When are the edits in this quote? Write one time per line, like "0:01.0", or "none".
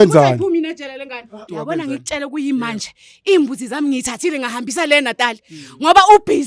0:01.4

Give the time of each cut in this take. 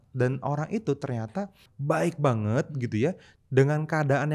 0:01.6
0:03.3

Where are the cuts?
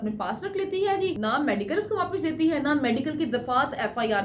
0:01.2

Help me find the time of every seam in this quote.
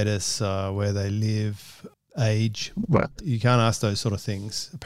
0:03.1

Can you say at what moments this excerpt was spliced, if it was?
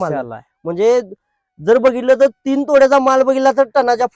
none

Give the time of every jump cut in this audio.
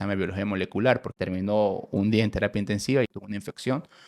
0:01.1
0:03.1

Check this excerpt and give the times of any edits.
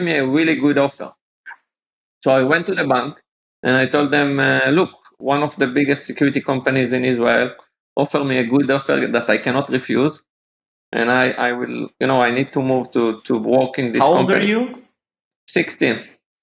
0:15.3

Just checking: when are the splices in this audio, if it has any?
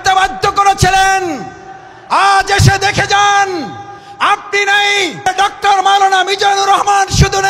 0:05.3

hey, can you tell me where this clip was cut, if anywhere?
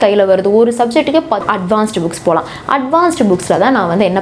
0:01.4

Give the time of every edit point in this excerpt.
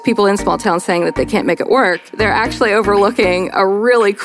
0:02.0

